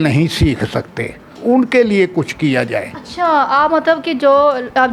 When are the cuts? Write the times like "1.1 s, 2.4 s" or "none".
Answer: none

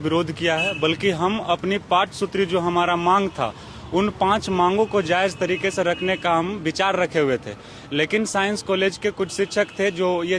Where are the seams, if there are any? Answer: none

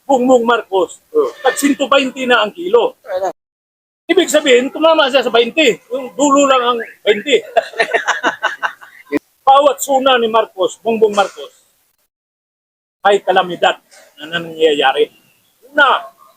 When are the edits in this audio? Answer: 3.4 s, 9.2 s

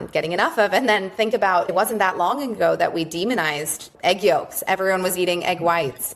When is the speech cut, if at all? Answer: none

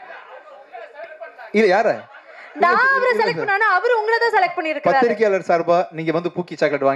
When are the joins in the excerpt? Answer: none

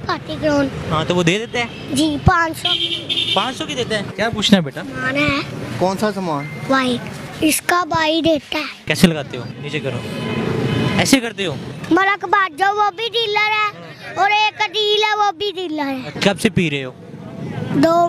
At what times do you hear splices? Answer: 4.1 s, 7.2 s, 8.8 s, 11.7 s

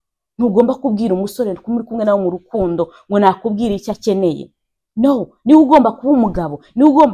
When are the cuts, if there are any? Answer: none

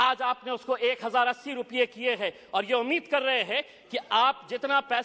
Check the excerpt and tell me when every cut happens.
none

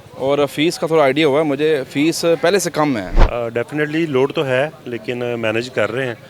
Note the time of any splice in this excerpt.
3.1 s

